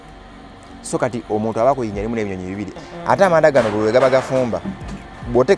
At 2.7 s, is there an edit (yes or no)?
yes